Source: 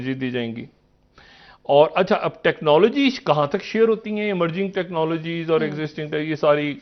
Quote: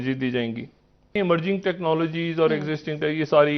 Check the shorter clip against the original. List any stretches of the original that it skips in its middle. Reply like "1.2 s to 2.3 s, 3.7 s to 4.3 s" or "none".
1.1 s to 4.2 s